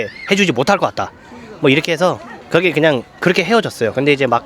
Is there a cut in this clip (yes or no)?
no